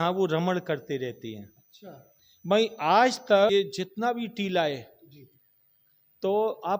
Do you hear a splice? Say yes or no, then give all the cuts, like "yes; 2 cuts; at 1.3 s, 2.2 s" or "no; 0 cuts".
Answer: yes; 1 cut; at 3.5 s